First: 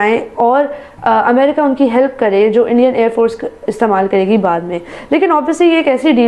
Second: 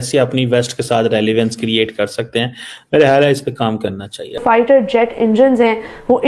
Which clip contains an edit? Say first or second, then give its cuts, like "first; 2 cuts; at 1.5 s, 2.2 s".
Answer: second; 1 cut; at 4.3 s